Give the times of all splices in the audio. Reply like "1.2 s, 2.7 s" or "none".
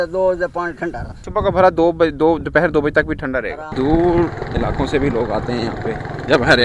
1.2 s, 3.6 s